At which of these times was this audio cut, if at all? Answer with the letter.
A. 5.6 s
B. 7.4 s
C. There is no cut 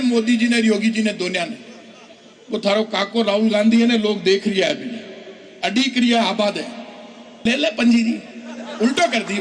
B